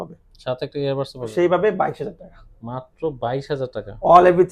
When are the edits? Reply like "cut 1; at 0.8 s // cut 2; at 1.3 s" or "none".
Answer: cut 1; at 1.3 s